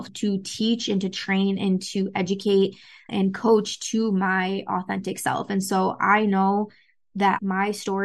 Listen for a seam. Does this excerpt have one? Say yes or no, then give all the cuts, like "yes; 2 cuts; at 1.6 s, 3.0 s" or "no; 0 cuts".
no; 0 cuts